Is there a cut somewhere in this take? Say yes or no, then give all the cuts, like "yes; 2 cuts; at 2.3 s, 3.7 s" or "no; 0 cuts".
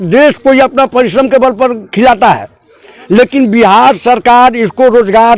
no; 0 cuts